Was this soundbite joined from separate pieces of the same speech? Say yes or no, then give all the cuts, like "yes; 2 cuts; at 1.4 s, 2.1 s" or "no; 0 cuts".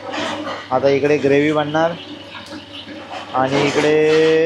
no; 0 cuts